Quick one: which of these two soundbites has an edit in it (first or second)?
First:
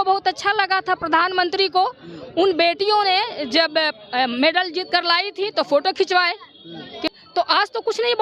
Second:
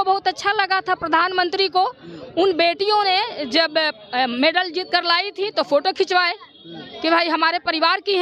first